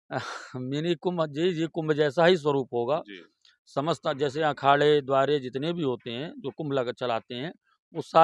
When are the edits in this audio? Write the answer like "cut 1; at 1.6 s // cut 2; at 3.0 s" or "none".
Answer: none